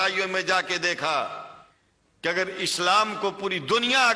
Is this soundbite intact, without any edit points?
yes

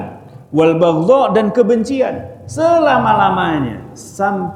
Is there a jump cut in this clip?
no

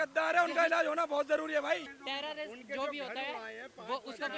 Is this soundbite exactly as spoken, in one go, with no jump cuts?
no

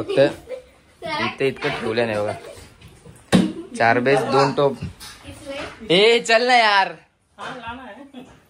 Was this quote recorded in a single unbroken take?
yes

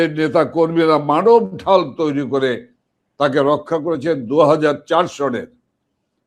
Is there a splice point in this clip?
no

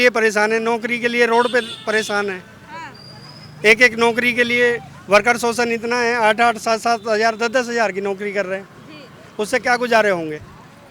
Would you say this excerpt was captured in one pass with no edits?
yes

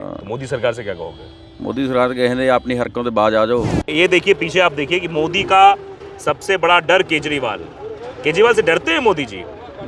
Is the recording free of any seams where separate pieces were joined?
no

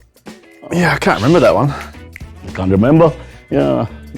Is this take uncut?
yes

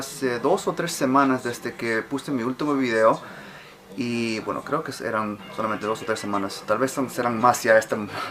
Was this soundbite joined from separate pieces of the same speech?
yes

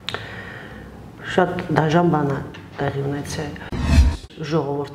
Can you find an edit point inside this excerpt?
yes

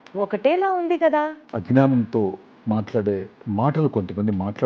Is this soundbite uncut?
no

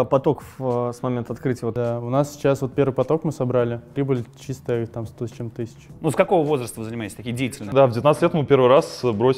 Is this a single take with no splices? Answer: no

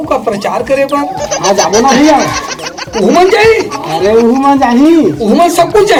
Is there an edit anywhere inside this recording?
no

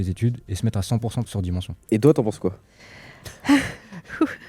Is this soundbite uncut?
no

